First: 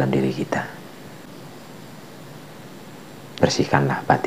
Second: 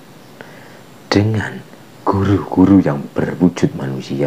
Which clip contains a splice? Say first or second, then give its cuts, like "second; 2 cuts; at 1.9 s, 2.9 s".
first; 1 cut; at 1.3 s